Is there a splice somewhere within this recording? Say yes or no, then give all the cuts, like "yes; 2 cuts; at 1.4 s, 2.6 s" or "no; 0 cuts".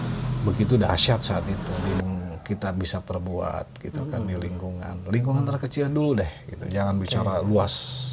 yes; 1 cut; at 2.0 s